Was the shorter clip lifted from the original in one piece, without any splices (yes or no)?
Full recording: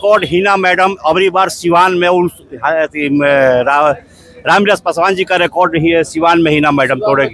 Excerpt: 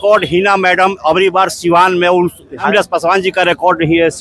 no